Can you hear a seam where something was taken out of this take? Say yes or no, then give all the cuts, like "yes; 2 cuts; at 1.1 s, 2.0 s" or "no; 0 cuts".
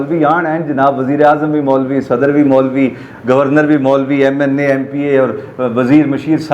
no; 0 cuts